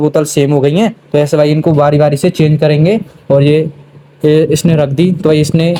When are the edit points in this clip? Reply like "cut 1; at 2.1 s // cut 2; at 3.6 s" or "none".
none